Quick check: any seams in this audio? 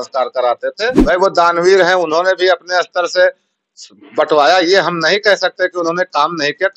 yes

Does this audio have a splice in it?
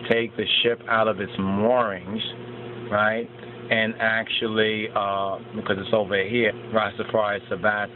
no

